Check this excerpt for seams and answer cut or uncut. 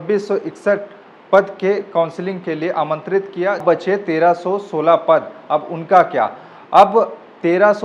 cut